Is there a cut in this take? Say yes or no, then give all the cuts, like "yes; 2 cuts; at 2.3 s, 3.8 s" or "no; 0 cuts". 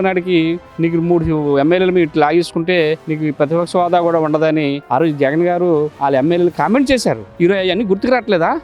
yes; 4 cuts; at 3.1 s, 4.8 s, 5.9 s, 7.3 s